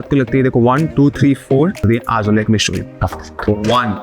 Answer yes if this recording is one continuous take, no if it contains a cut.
no